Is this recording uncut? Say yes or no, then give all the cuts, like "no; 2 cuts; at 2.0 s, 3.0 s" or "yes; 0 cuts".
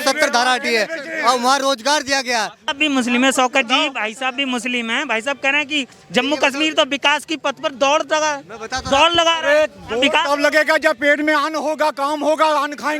no; 1 cut; at 2.6 s